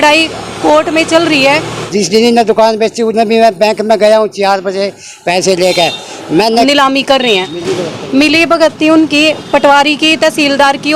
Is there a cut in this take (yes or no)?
yes